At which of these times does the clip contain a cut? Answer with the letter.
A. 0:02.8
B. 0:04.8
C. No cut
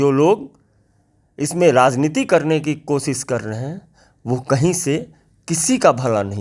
C